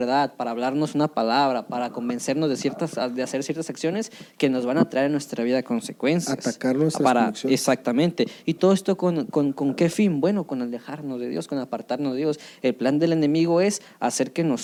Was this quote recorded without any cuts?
yes; 0 cuts

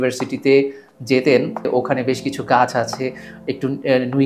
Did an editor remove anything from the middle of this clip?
no; 0 cuts

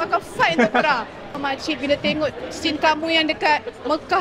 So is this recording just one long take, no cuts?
no; 1 cut; at 1.4 s

